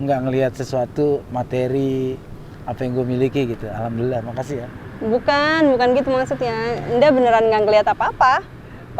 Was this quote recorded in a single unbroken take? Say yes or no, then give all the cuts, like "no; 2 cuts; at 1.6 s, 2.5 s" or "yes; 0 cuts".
yes; 0 cuts